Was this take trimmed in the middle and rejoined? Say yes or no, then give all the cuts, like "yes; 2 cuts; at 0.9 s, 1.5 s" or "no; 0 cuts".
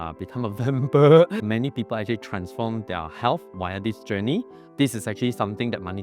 yes; 1 cut; at 1.4 s